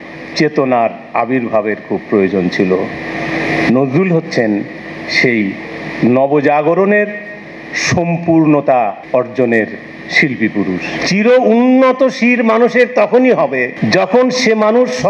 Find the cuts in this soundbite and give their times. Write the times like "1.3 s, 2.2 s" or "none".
9.0 s, 11.0 s, 13.7 s